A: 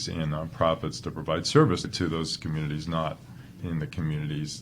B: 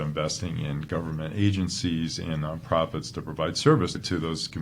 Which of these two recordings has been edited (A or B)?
A